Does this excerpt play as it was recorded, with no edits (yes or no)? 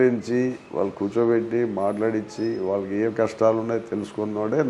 yes